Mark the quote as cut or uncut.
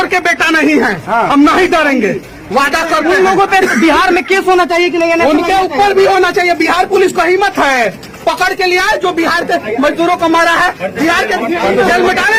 uncut